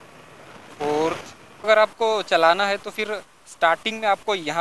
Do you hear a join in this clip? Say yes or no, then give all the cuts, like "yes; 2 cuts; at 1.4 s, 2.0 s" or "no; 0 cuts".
yes; 1 cut; at 1.7 s